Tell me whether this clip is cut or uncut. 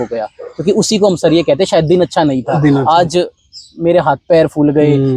uncut